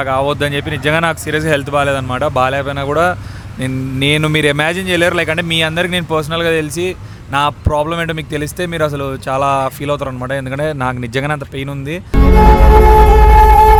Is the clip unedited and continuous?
yes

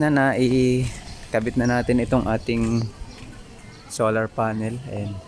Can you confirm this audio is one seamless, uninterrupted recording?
yes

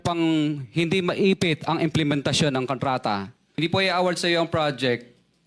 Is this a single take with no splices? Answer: no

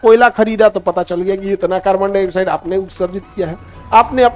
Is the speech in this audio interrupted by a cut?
no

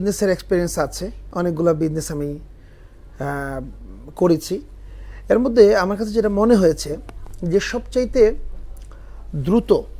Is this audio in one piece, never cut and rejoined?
no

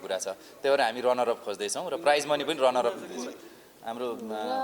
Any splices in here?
no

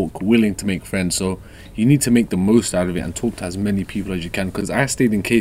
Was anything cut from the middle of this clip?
no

